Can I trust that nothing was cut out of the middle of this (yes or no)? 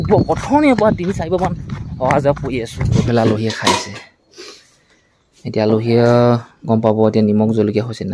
no